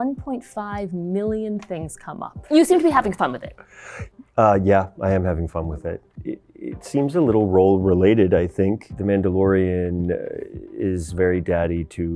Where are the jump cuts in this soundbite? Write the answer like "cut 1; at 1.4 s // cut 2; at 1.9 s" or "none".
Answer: cut 1; at 2.3 s // cut 2; at 6.3 s // cut 3; at 8.8 s

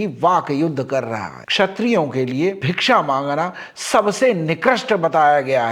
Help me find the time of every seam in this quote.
cut 1; at 1.4 s

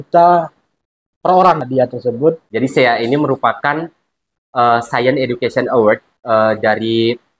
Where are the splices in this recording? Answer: cut 1; at 1.6 s // cut 2; at 2.4 s // cut 3; at 6.1 s

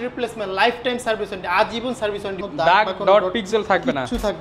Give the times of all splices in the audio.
cut 1; at 2.5 s

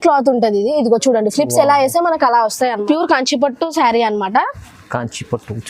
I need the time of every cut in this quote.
cut 1; at 2.8 s

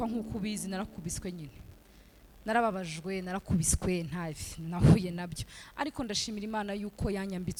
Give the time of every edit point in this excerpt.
none

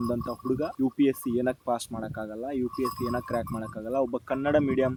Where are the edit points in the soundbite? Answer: none

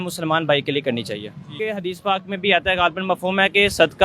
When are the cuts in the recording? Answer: cut 1; at 1.5 s

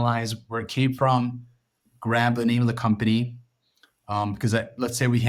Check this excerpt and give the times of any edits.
none

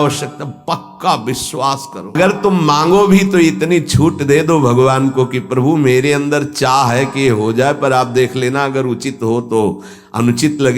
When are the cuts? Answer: cut 1; at 2.2 s

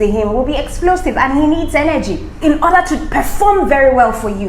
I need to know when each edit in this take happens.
cut 1; at 2.3 s

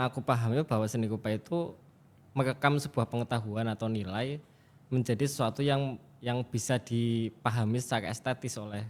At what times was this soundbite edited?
none

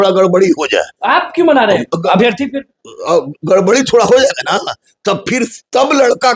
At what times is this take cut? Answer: cut 1; at 0.9 s

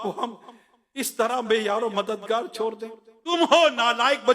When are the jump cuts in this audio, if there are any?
cut 1; at 3.3 s

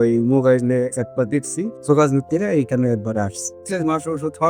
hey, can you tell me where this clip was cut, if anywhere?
cut 1; at 1.8 s // cut 2; at 3.6 s

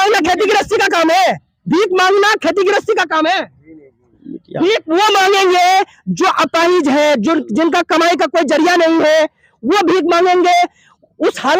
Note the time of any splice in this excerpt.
none

